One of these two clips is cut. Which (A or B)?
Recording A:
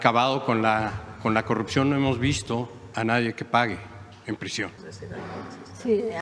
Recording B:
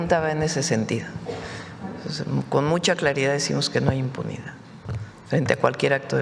A